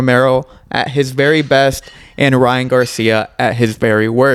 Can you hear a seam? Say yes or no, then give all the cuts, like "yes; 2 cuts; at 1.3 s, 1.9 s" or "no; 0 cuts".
no; 0 cuts